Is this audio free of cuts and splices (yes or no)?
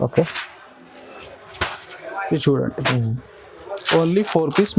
yes